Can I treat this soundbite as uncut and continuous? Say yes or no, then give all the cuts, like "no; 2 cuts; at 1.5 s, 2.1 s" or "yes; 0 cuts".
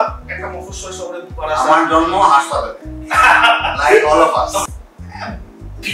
no; 1 cut; at 4.6 s